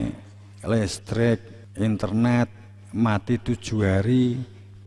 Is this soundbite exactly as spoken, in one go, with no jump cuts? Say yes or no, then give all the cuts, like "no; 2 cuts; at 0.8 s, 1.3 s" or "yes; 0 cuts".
no; 1 cut; at 1.6 s